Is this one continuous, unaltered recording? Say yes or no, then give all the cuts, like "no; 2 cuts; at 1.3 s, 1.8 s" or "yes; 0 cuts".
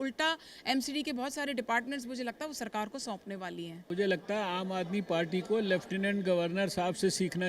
no; 1 cut; at 3.8 s